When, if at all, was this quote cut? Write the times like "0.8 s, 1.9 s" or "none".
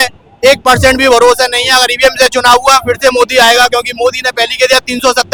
none